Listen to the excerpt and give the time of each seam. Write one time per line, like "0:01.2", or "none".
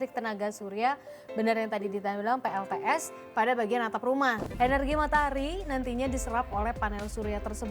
0:04.5

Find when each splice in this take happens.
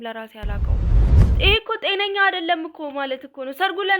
0:01.3

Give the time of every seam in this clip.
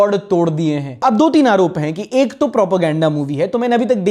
0:00.9

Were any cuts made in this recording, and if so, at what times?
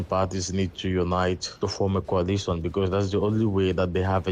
0:01.5

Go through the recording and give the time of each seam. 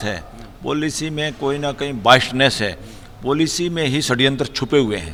none

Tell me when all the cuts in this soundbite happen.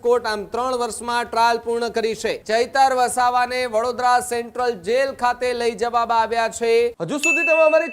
0:02.4
0:07.0

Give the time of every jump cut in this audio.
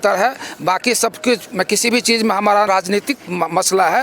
0:02.7

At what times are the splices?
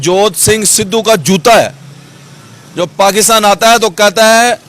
none

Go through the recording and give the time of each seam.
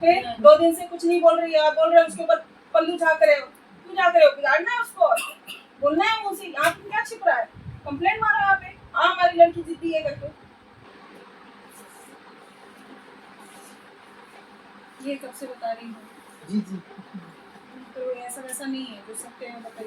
0:10.8

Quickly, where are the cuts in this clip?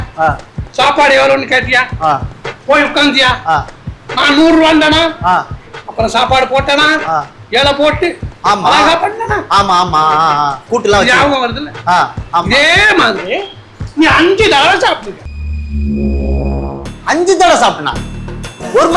none

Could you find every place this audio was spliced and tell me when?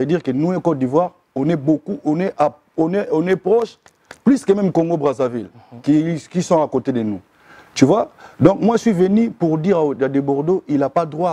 none

